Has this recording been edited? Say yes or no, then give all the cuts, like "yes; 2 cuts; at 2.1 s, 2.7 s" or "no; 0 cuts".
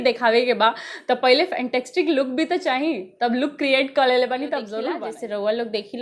yes; 1 cut; at 5.0 s